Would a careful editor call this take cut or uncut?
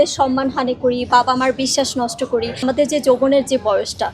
cut